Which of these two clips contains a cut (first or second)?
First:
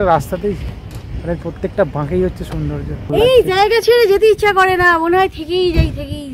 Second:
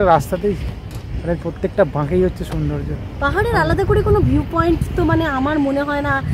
first